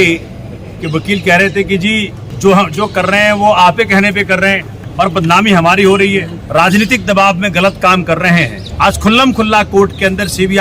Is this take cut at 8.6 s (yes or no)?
yes